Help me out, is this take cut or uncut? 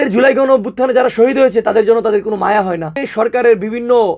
cut